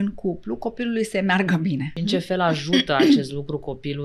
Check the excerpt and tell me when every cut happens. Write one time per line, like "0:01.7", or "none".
0:01.9

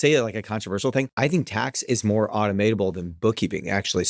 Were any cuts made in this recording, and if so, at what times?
0:01.1

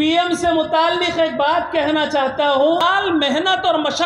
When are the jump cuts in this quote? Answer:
0:02.8

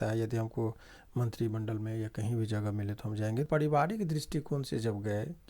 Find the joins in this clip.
0:03.5

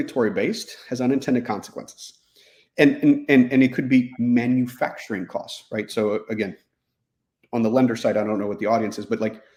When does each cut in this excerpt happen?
none

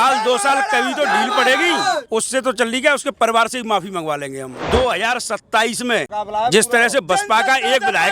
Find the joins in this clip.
0:04.5
0:06.1

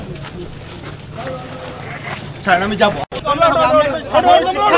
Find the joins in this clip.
0:03.1

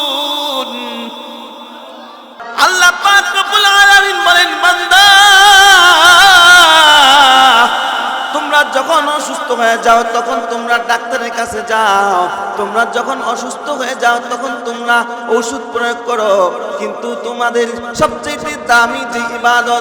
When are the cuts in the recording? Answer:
0:02.4

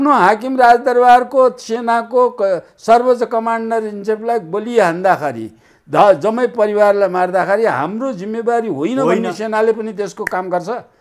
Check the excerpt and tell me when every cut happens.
none

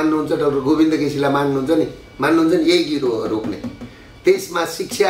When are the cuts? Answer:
none

